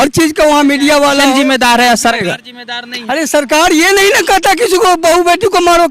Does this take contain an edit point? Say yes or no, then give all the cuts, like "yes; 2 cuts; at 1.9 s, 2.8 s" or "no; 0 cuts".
yes; 1 cut; at 1.2 s